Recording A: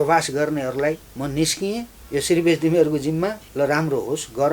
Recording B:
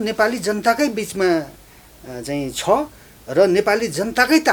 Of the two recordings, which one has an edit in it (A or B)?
A